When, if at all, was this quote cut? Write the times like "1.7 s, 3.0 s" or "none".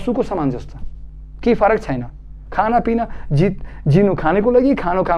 none